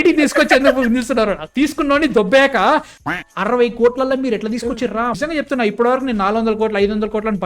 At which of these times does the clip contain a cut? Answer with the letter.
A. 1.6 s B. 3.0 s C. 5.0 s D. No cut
B